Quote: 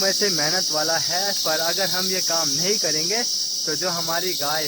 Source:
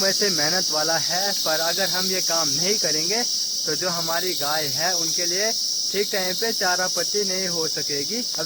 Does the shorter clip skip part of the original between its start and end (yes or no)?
no